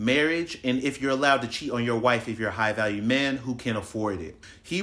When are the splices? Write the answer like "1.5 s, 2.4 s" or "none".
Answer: none